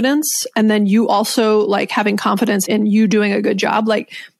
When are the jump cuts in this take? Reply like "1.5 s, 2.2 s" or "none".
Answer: 2.6 s